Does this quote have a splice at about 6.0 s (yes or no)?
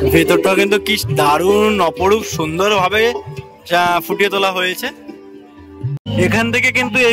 yes